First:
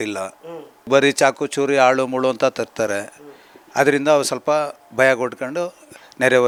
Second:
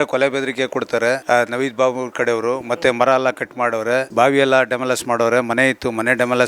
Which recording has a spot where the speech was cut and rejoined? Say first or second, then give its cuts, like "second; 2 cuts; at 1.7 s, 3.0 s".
second; 1 cut; at 4.1 s